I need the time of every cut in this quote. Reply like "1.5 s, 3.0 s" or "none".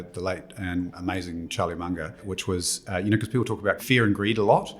1.0 s, 2.2 s, 3.8 s